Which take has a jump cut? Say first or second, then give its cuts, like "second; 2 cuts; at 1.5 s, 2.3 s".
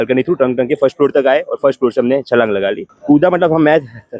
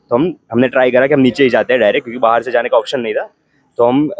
first; 1 cut; at 2.9 s